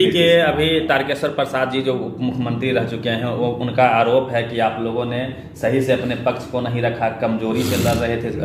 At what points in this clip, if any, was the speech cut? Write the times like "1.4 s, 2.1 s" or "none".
none